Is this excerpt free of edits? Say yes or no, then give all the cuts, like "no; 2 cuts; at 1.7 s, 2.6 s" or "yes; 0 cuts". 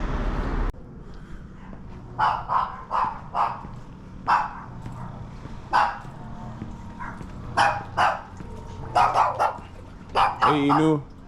yes; 0 cuts